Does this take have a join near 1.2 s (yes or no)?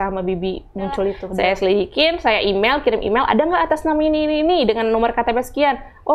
yes